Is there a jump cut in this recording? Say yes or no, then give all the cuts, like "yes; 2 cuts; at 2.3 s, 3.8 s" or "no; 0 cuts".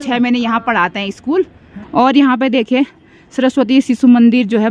yes; 1 cut; at 1.7 s